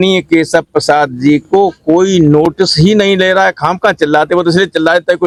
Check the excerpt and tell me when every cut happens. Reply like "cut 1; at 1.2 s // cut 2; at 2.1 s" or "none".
none